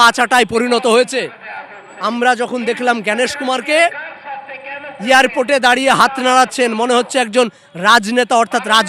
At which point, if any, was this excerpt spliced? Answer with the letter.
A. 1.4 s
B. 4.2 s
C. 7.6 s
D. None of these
D